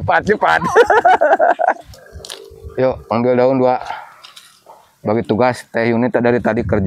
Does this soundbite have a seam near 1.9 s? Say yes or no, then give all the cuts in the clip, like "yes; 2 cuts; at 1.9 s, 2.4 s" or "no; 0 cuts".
yes; 1 cut; at 1.9 s